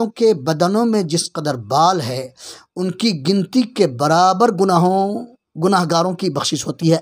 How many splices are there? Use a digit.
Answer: 0